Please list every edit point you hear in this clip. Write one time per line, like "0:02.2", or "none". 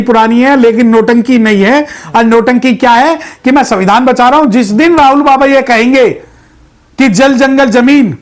none